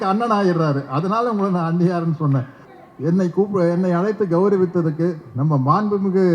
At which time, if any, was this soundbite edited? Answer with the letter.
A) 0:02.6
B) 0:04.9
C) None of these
A